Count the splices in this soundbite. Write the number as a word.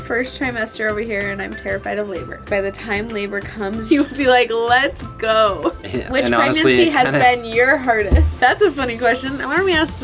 four